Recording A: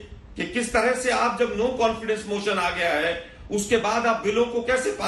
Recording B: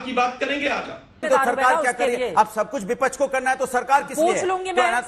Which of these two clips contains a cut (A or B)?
B